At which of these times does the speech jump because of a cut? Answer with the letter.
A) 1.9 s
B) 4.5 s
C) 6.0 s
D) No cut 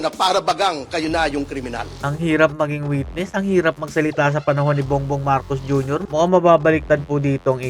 C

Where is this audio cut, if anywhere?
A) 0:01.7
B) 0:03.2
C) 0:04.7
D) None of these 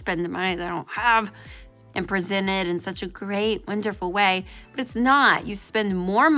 A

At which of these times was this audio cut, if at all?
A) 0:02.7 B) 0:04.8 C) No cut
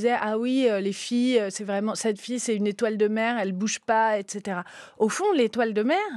C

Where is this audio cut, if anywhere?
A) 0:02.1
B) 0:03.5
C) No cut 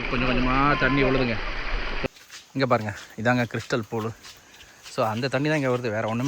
A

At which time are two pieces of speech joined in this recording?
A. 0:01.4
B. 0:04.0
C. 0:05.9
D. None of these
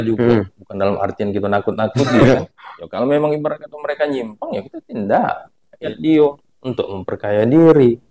C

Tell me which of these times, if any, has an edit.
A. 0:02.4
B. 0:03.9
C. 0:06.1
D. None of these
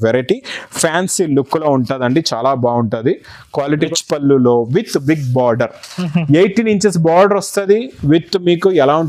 B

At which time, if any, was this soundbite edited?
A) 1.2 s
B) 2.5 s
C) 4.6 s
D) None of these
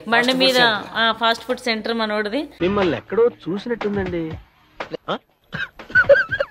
D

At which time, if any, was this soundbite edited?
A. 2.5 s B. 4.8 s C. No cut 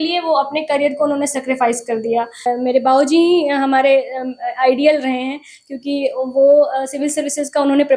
A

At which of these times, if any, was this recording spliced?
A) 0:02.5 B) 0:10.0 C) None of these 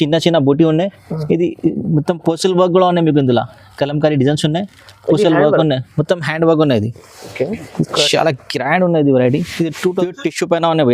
B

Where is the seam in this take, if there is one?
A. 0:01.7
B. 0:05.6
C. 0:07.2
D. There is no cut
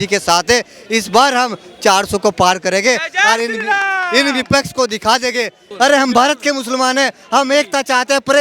B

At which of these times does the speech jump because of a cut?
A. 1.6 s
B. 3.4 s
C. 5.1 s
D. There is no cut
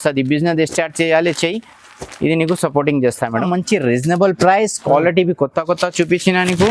B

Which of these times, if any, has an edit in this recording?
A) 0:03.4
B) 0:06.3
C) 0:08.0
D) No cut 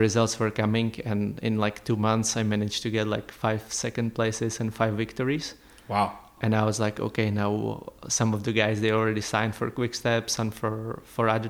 B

